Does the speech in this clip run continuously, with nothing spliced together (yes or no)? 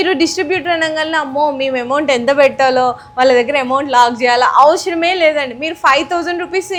yes